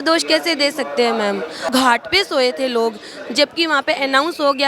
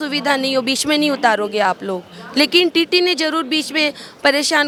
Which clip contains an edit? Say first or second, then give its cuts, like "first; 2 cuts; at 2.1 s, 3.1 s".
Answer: first; 1 cut; at 1.7 s